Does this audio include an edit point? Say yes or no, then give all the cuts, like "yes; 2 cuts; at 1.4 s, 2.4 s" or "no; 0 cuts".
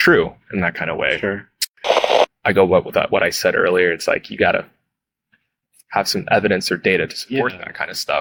yes; 1 cut; at 2.1 s